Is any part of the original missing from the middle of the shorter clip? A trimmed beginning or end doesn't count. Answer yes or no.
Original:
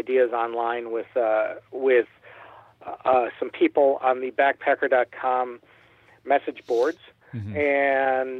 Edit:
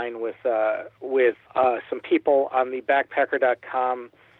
yes